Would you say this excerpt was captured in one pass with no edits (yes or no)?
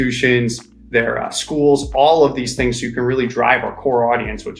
yes